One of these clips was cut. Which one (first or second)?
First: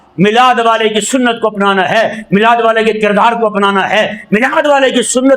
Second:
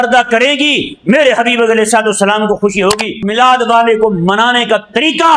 second